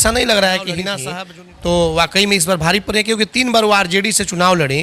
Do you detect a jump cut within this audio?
yes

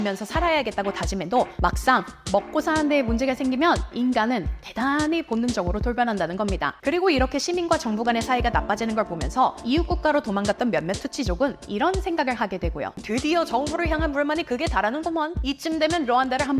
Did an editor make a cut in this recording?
yes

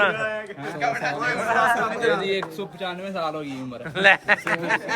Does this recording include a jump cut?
no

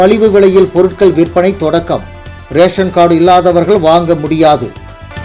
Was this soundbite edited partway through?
no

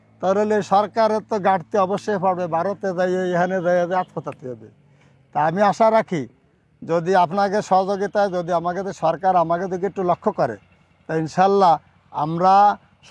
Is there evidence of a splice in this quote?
no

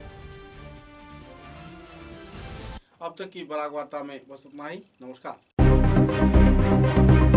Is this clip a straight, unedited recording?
yes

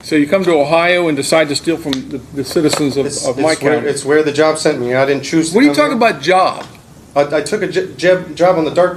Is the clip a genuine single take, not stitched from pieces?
yes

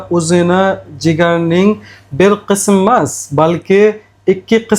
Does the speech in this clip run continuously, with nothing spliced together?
yes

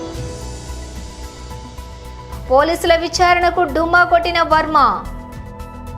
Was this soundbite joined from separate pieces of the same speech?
yes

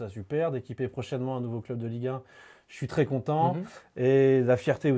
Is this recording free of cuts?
yes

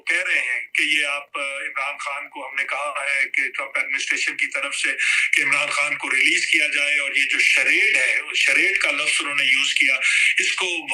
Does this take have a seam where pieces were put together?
no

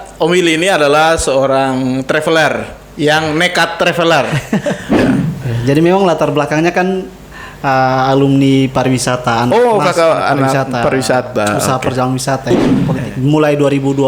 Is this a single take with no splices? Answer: no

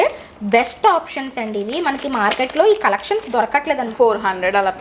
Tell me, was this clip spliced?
yes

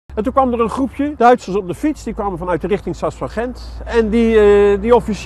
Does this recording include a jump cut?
yes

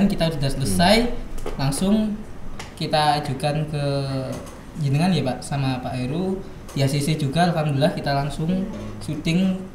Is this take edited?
yes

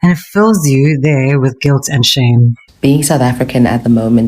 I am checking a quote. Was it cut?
yes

